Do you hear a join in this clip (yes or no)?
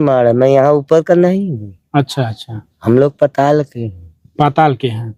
no